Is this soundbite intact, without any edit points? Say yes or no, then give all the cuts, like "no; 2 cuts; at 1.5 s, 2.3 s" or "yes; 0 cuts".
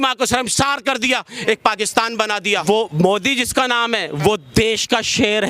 no; 1 cut; at 2.6 s